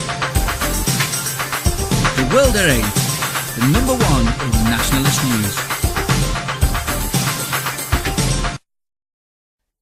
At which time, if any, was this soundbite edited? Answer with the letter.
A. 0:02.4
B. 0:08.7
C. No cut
C